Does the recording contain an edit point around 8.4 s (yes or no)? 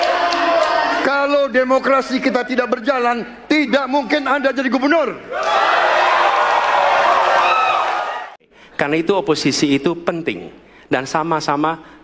yes